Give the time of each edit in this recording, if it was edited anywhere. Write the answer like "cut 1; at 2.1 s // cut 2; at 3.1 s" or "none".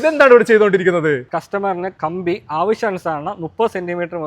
cut 1; at 1.3 s

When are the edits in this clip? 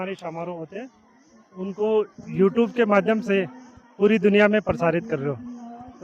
none

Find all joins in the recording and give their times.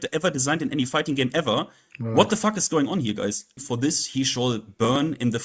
cut 1; at 3.6 s

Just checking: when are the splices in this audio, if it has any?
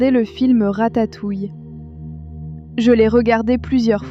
cut 1; at 2.0 s

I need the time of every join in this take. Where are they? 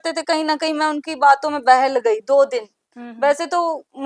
none

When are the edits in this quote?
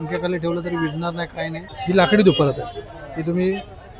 cut 1; at 1.7 s

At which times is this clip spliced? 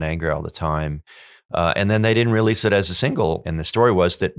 cut 1; at 3.4 s

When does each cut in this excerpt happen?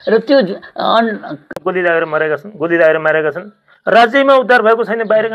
cut 1; at 1.6 s

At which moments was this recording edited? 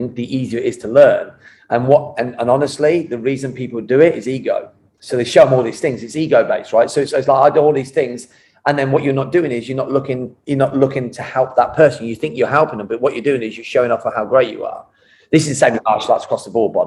none

